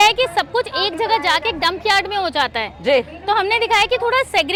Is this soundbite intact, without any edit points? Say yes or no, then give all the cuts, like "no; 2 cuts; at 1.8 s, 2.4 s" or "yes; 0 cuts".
yes; 0 cuts